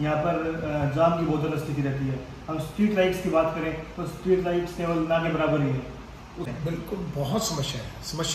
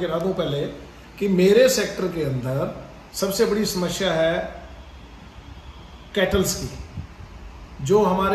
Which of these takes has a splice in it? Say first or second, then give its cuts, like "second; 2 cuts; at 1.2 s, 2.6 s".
first; 1 cut; at 6.5 s